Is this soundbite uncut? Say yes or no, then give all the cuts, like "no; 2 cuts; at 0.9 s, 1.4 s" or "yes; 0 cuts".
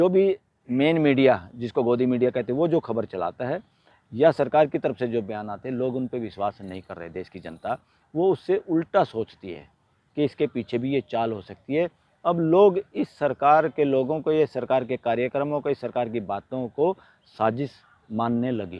yes; 0 cuts